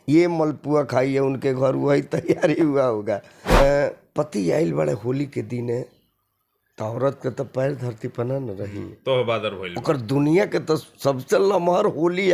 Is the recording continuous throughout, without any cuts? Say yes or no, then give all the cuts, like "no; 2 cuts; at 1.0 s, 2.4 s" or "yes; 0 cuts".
no; 1 cut; at 3.6 s